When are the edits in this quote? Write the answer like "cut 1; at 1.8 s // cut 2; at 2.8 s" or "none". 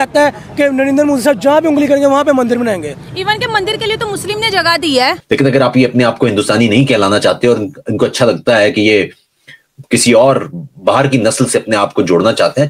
cut 1; at 5.2 s